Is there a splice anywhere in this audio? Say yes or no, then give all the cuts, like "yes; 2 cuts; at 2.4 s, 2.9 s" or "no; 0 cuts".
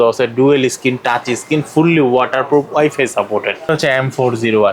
yes; 1 cut; at 3.7 s